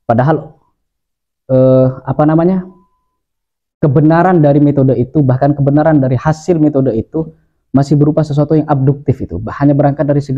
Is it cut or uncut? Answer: uncut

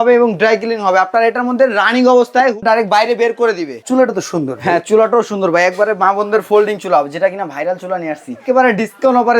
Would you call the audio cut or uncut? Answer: cut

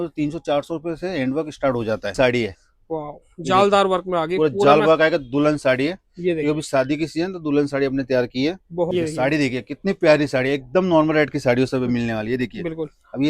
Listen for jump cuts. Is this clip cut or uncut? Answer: cut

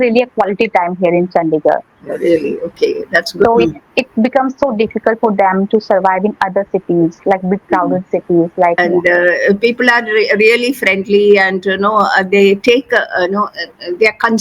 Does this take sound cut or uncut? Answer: cut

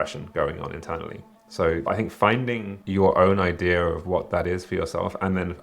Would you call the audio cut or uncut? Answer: cut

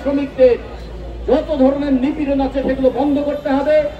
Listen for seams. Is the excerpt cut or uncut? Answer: uncut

